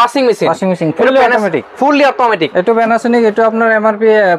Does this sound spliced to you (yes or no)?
no